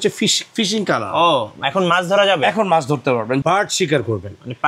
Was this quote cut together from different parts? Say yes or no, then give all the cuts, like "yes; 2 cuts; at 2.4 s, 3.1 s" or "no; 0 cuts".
yes; 1 cut; at 3.4 s